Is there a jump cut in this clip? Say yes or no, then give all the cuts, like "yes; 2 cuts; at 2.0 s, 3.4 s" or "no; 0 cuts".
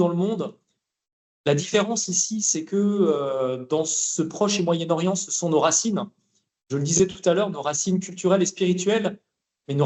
no; 0 cuts